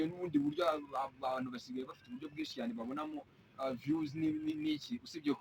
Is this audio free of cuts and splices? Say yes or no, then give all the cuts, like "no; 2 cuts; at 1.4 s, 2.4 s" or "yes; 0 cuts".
yes; 0 cuts